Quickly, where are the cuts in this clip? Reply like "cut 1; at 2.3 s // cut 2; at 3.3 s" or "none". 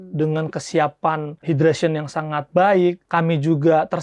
cut 1; at 1.3 s // cut 2; at 3.0 s